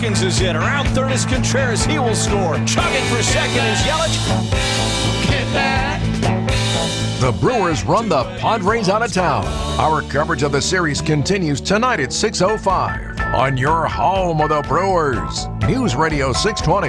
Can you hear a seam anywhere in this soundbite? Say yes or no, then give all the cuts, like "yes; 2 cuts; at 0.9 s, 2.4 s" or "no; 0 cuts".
no; 0 cuts